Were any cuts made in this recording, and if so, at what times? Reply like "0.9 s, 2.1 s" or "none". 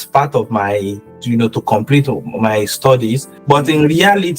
3.3 s

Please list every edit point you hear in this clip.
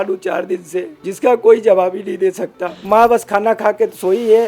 1.0 s, 2.8 s

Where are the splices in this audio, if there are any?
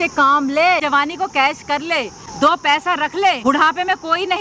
0.8 s, 2.2 s, 3.4 s

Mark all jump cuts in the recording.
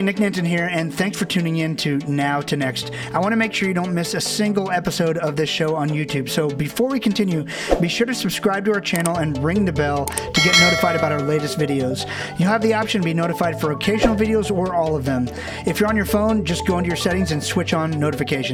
none

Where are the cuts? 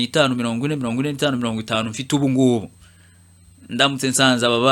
none

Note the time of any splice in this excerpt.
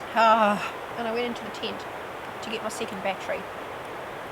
0.9 s

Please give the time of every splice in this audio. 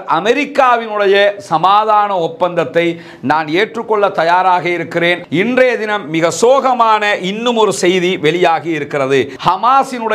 5.2 s, 9.3 s

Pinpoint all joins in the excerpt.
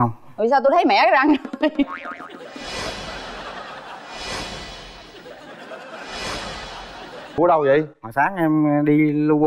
7.3 s

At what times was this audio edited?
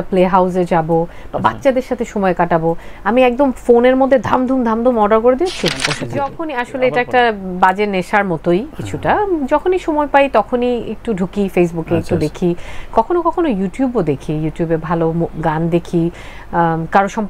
6.0 s

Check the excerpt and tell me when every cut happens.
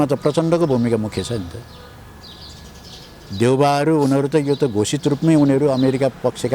none

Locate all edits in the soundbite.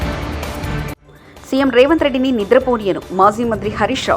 0.9 s

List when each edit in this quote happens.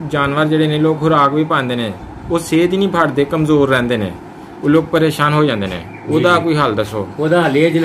none

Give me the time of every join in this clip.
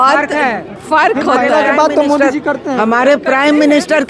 none

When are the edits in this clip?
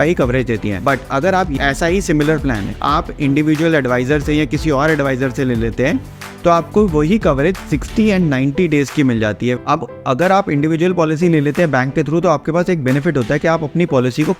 2.7 s, 9.6 s

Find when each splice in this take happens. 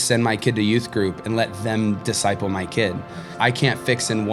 3.3 s

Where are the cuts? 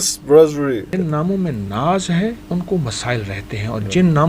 0.9 s, 2.4 s

